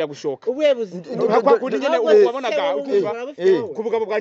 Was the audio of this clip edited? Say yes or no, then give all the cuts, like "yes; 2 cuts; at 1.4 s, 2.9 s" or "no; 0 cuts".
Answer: no; 0 cuts